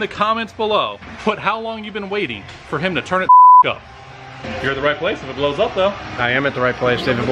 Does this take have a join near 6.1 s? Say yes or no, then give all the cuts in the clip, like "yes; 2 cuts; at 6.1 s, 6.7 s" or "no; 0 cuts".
no; 2 cuts; at 1.0 s, 4.4 s